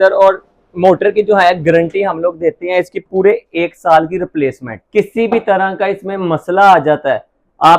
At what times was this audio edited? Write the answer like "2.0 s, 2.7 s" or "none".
none